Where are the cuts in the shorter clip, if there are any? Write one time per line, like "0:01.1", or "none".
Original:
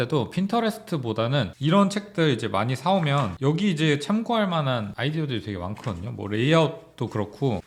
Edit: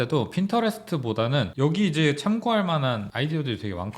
0:01.5